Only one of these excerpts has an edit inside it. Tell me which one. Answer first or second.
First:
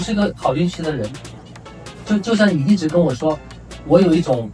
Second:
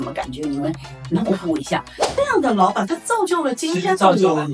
second